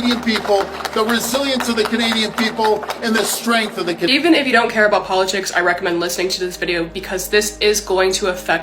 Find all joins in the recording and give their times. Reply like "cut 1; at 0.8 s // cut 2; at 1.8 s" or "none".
cut 1; at 4.1 s